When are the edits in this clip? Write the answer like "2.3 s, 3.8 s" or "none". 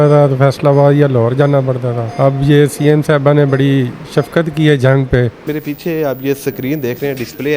2.0 s, 5.4 s